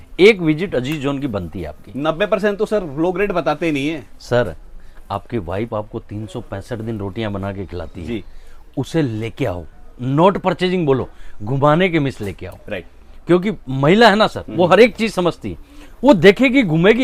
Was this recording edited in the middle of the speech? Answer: no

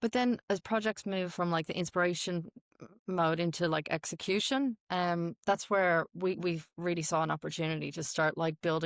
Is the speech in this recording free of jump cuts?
yes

